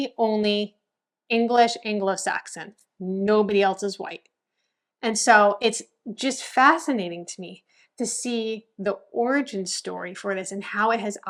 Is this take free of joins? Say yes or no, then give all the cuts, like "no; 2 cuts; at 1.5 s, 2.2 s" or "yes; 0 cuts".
yes; 0 cuts